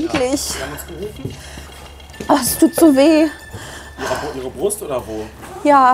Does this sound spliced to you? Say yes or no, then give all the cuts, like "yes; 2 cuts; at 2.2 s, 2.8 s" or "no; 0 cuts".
yes; 1 cut; at 1.7 s